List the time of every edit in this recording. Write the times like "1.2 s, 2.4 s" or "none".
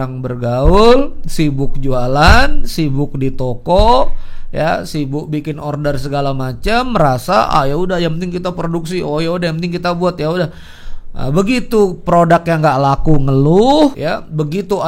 14.0 s